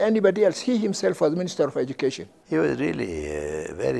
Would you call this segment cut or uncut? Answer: cut